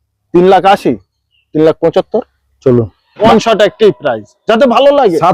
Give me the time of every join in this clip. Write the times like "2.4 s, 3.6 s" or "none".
3.1 s